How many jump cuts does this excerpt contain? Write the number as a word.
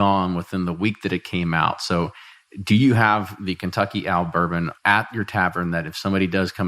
one